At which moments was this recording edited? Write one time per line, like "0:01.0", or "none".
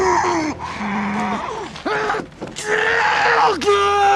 none

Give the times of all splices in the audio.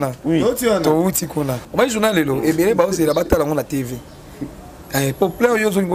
0:01.6

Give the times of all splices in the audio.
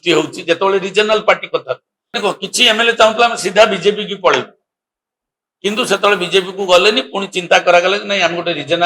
0:02.2

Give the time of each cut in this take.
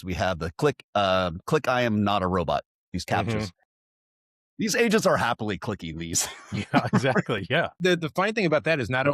0:07.7

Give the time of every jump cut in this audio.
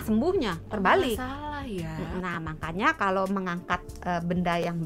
0:02.2

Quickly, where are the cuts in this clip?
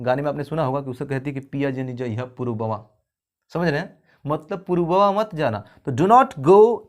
none

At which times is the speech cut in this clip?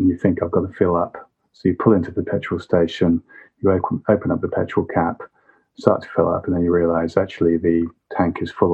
none

